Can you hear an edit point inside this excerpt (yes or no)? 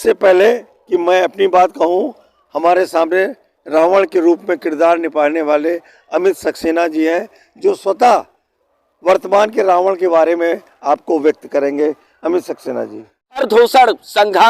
yes